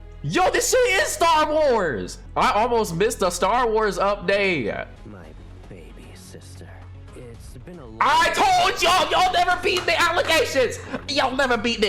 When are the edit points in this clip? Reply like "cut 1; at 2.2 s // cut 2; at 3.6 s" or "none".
cut 1; at 2.1 s // cut 2; at 5.0 s